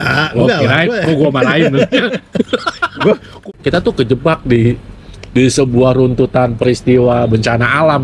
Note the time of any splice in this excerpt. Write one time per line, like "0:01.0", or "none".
0:03.5